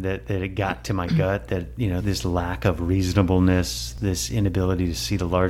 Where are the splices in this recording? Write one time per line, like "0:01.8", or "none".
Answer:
0:02.0